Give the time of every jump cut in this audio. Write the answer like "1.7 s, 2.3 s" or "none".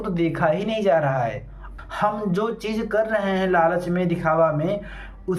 1.6 s